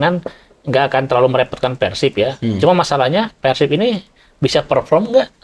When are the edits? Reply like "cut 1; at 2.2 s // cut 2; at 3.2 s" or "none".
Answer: none